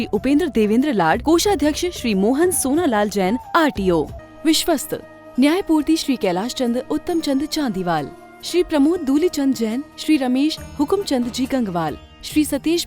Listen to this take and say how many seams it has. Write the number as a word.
one